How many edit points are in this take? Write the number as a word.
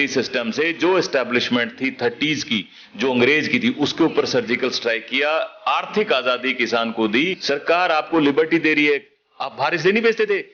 one